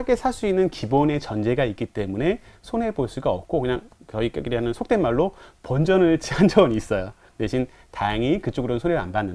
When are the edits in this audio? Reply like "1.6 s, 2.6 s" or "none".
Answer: none